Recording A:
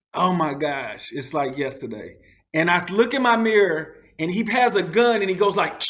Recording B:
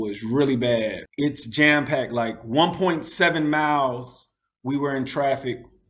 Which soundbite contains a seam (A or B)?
B